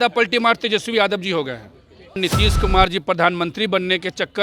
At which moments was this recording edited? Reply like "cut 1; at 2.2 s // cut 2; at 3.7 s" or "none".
cut 1; at 2.2 s